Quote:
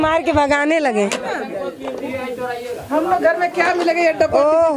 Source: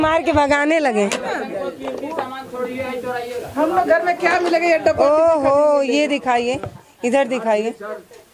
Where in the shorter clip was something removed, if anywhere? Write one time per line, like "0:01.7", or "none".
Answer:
0:02.1